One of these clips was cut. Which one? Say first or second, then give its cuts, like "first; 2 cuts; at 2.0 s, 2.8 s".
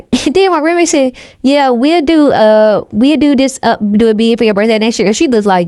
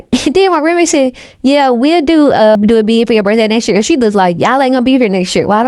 second; 1 cut; at 2.6 s